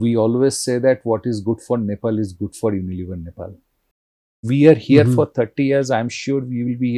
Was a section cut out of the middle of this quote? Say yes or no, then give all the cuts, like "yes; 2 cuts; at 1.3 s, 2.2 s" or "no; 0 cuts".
yes; 1 cut; at 4.5 s